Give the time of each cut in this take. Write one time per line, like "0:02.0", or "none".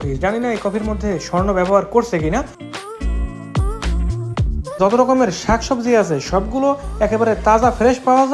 0:04.8